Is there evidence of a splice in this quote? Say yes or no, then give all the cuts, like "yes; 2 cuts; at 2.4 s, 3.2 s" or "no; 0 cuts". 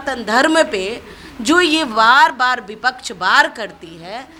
no; 0 cuts